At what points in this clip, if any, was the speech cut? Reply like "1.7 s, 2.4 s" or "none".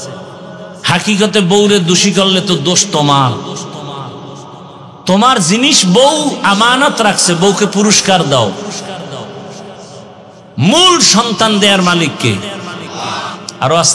none